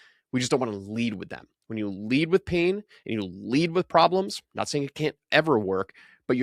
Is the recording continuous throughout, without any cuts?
yes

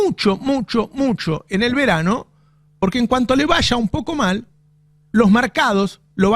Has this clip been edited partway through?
no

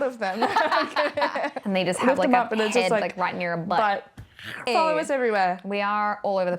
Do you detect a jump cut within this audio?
yes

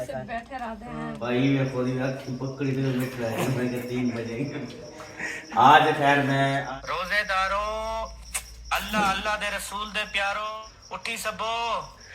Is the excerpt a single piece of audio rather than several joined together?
no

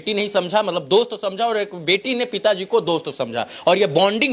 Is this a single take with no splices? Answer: yes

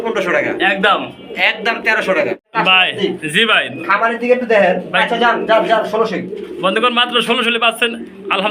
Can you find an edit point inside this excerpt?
yes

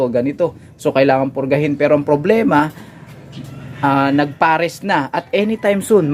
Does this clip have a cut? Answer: no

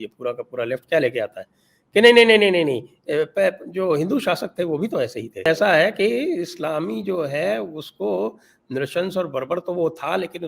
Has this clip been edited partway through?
yes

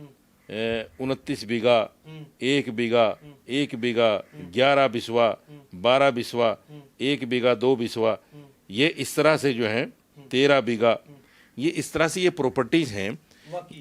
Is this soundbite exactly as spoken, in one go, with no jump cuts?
yes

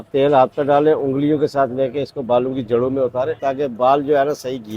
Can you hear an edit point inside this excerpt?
yes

